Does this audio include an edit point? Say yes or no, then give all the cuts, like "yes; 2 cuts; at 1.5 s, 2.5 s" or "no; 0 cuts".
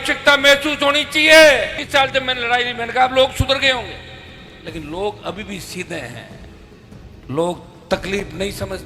yes; 1 cut; at 1.8 s